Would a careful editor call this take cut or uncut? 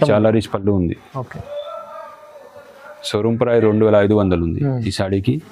uncut